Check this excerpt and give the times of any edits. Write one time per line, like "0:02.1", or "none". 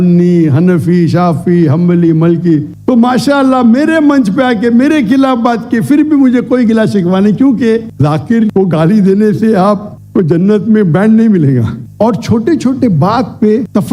0:02.7
0:07.9
0:11.8